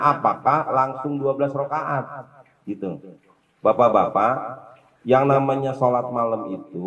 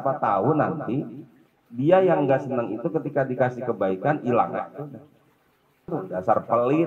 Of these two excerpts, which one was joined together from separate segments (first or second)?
second